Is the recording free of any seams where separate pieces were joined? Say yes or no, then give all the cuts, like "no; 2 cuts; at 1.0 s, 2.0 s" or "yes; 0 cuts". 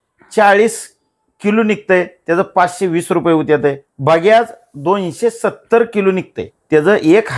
no; 2 cuts; at 3.9 s, 6.5 s